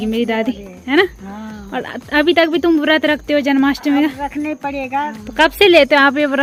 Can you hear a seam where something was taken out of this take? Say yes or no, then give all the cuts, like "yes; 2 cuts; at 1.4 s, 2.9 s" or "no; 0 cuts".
no; 0 cuts